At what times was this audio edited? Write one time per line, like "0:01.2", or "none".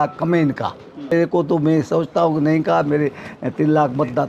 0:01.1